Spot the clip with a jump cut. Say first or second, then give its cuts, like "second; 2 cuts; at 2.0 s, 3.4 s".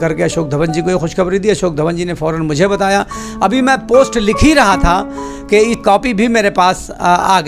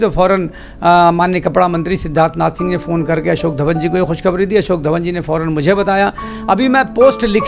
first; 1 cut; at 5.7 s